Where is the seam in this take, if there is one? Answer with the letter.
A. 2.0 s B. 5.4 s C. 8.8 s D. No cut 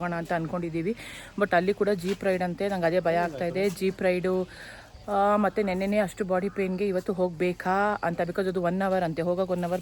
D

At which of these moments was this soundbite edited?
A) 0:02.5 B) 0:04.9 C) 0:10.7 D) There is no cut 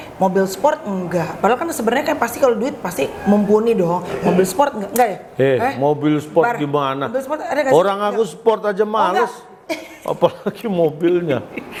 D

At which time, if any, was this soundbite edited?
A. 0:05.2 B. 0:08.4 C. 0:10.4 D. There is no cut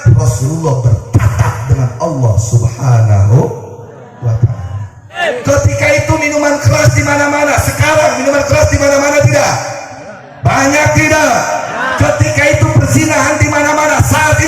A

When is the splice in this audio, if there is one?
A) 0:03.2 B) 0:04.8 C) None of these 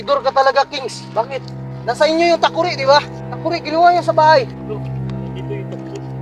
A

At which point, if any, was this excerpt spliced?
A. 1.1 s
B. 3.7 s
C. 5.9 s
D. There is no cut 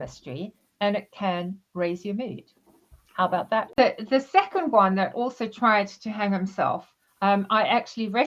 B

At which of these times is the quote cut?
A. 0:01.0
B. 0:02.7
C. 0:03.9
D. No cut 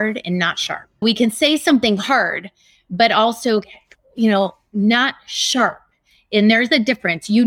A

